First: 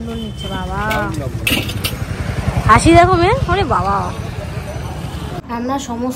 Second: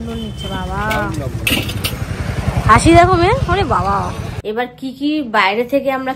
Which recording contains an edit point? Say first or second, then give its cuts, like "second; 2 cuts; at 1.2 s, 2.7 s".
second; 1 cut; at 4.3 s